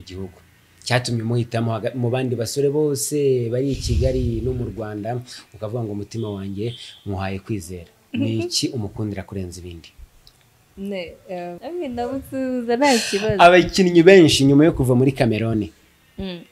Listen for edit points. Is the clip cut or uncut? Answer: cut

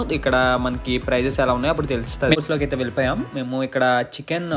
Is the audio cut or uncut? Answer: cut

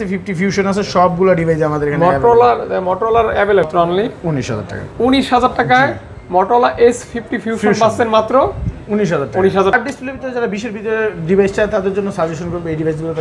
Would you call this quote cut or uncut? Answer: cut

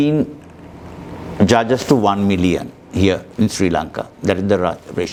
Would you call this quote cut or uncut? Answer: uncut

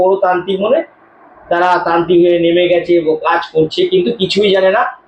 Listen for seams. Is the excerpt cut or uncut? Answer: uncut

